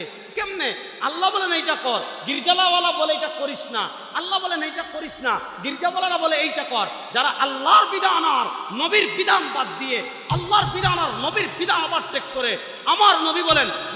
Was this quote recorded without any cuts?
yes; 0 cuts

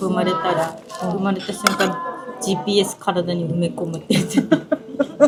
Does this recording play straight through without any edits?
yes; 0 cuts

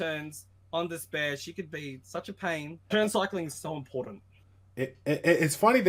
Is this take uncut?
no; 1 cut; at 2.9 s

